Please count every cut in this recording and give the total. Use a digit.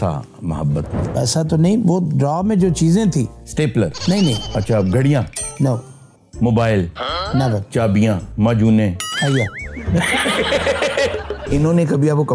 3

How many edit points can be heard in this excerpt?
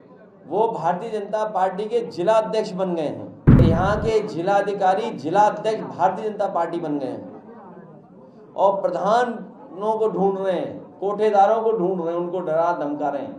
1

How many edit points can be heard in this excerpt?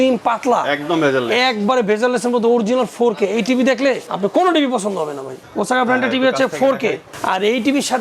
3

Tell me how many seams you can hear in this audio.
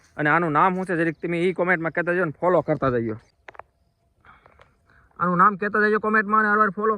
1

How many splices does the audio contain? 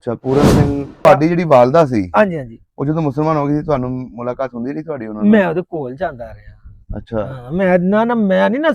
1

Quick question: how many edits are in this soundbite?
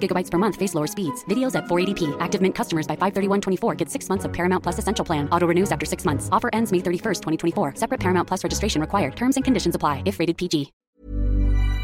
1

